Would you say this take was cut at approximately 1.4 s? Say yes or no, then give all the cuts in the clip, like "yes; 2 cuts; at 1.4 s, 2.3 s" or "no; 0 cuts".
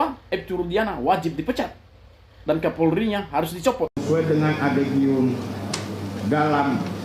no; 1 cut; at 4.0 s